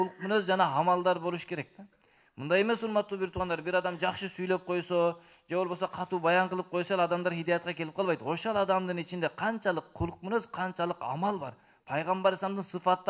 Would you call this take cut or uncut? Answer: uncut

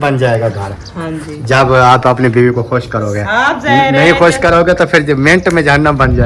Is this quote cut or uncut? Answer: uncut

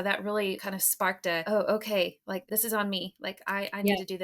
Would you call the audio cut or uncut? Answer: cut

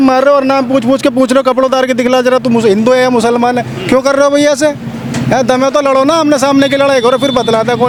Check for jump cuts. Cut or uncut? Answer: uncut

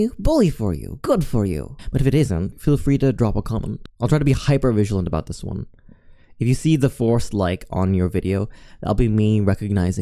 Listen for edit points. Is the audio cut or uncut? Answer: uncut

